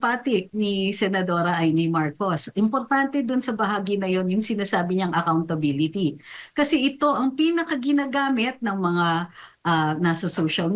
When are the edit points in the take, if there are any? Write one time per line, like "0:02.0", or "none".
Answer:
none